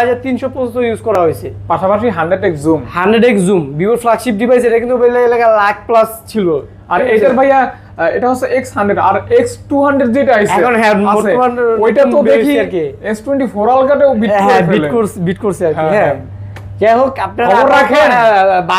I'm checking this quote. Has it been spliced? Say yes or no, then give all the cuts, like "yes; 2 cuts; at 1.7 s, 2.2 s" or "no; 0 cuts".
no; 0 cuts